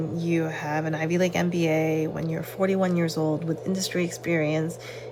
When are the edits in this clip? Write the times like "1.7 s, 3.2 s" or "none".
none